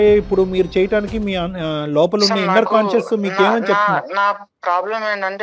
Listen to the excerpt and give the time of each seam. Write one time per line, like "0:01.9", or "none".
none